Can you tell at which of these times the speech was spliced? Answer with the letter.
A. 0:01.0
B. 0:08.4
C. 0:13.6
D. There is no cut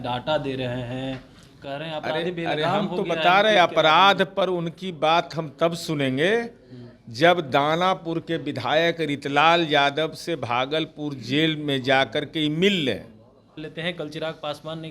C